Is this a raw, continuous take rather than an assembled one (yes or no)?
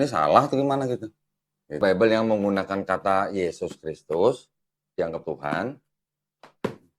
no